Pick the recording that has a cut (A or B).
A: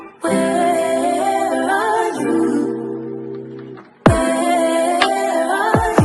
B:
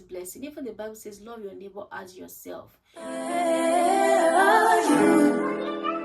B